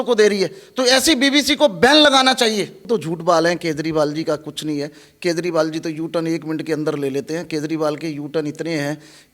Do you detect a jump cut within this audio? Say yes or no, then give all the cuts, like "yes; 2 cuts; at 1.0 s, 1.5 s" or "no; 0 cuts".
yes; 1 cut; at 2.8 s